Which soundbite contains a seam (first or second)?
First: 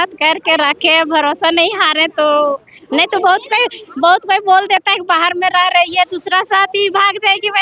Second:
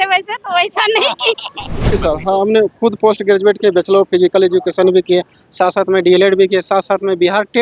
second